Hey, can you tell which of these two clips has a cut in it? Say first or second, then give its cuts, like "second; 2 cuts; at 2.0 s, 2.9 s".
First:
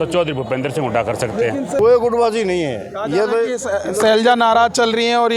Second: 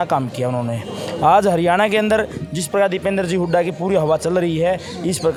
first; 1 cut; at 1.8 s